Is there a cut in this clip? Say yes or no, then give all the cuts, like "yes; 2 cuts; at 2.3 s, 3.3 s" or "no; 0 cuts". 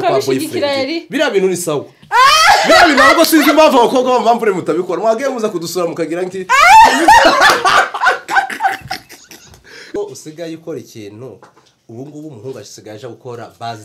yes; 1 cut; at 9.8 s